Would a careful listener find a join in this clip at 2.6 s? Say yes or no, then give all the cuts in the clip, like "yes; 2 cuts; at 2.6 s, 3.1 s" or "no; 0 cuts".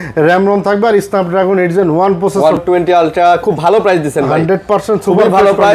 yes; 1 cut; at 2.6 s